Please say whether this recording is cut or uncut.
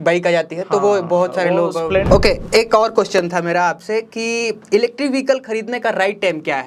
cut